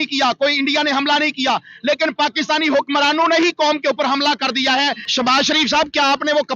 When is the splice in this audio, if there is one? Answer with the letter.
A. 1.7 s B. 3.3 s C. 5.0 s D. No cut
C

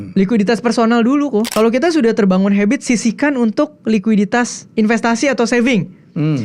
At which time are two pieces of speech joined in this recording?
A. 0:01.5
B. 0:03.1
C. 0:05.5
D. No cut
A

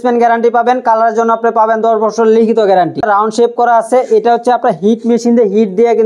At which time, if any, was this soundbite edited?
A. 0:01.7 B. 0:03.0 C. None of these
B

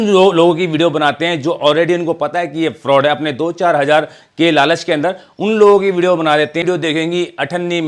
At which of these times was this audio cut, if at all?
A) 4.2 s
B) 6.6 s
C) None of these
B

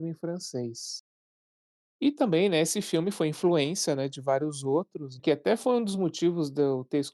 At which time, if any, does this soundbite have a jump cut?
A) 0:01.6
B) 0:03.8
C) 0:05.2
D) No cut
C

